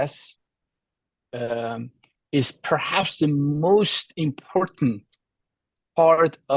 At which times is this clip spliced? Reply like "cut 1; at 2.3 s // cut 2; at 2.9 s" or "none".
none